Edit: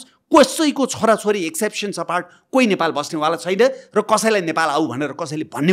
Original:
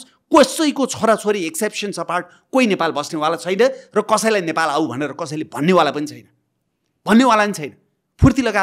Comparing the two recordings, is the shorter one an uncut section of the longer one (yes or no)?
yes